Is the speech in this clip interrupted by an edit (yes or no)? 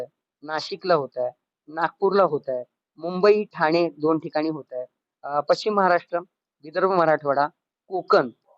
no